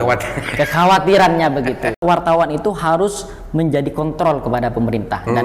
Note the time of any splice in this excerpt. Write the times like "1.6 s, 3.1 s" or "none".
2.0 s